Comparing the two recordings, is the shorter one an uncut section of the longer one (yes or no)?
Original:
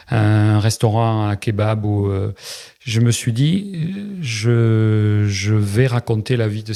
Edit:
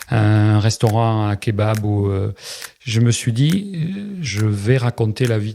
no